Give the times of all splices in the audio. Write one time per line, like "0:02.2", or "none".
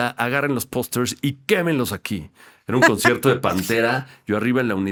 none